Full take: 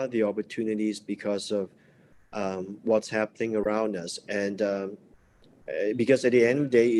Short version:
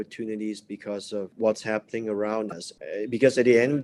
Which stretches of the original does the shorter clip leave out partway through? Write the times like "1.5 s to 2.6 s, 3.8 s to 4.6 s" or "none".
1.7 s to 2.8 s, 3.6 s to 5.0 s